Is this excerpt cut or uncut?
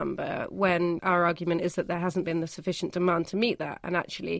cut